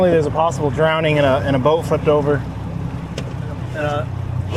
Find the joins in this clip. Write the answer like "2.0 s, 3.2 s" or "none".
none